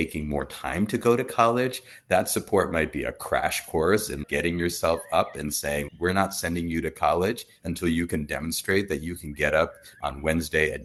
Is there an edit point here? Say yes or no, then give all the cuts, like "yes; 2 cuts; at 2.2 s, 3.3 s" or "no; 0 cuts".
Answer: no; 0 cuts